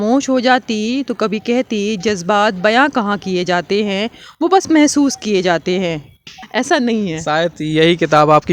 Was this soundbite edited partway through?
yes; 1 cut; at 6.3 s

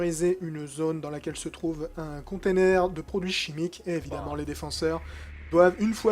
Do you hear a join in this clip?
yes; 1 cut; at 2.4 s

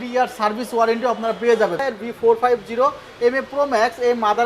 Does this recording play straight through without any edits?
no; 1 cut; at 1.8 s

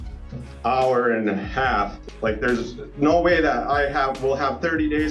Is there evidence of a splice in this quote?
yes; 1 cut; at 2.0 s

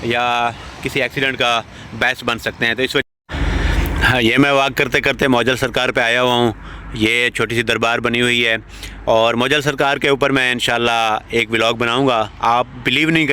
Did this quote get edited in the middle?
yes; 1 cut; at 3.0 s

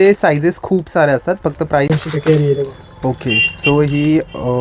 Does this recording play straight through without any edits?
no; 1 cut; at 1.9 s

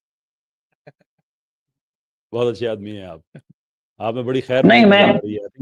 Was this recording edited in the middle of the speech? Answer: no; 0 cuts

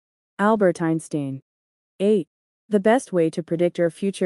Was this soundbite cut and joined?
yes; 1 cut; at 2.1 s

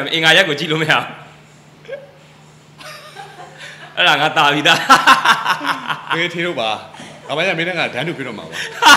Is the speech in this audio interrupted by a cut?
no; 0 cuts

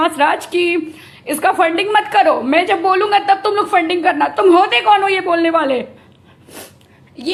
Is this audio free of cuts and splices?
yes; 0 cuts

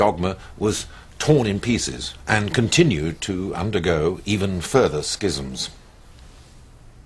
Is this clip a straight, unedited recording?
no; 1 cut; at 0.9 s

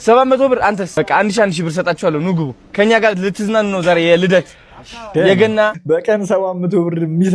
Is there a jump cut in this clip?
yes; 2 cuts; at 0.9 s, 5.8 s

